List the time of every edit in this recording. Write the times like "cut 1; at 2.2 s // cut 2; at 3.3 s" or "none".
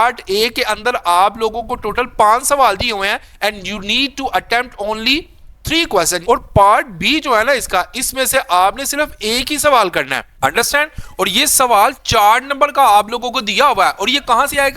cut 1; at 6.2 s // cut 2; at 10.2 s